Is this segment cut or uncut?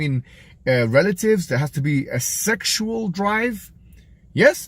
uncut